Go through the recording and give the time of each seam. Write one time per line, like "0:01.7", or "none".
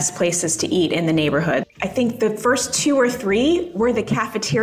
0:01.6